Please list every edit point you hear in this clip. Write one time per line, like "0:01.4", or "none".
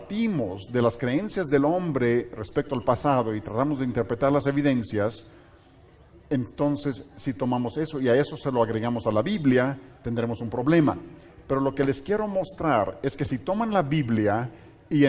0:05.6